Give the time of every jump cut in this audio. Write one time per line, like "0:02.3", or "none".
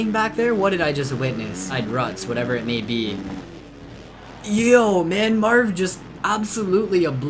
0:01.7